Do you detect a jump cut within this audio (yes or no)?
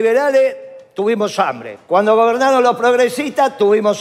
no